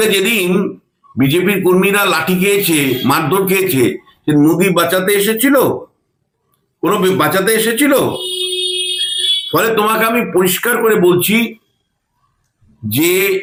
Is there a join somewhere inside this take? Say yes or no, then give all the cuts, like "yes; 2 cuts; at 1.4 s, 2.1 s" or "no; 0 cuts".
no; 0 cuts